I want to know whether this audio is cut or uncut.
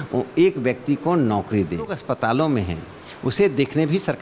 cut